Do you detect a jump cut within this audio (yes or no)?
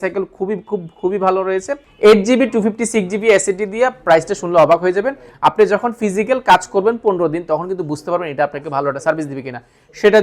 yes